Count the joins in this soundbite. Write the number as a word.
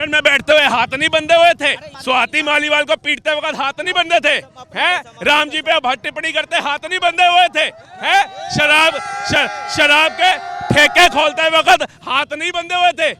one